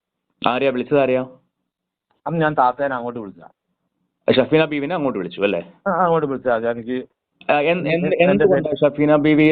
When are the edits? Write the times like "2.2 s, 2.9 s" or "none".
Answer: none